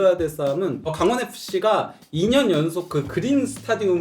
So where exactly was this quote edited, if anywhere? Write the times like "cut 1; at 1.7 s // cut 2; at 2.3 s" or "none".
cut 1; at 0.9 s